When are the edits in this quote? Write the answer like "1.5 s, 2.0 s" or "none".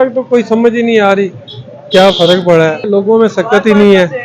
2.9 s